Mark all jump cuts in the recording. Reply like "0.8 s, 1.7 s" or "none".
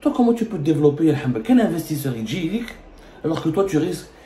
none